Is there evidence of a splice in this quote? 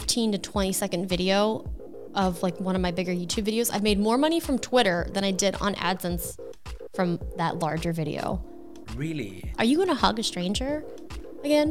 yes; 1 cut; at 9.1 s

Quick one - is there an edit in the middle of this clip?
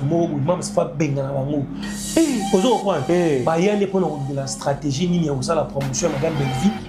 no; 0 cuts

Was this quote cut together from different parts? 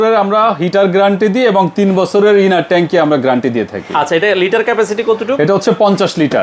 no; 0 cuts

